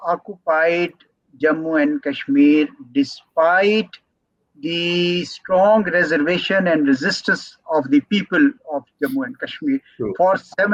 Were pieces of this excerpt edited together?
no; 0 cuts

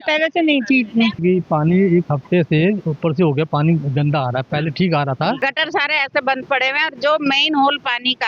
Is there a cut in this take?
yes; 2 cuts; at 1.2 s, 5.4 s

